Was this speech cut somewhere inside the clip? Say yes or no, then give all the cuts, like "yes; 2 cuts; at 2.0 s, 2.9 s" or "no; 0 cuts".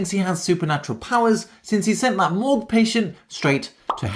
no; 0 cuts